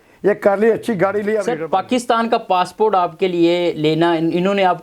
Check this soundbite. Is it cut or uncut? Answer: cut